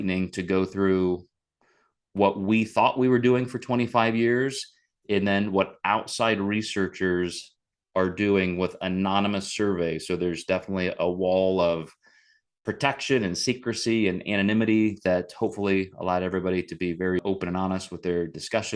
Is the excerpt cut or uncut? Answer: cut